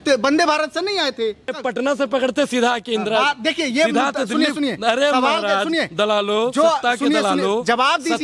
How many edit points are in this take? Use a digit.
1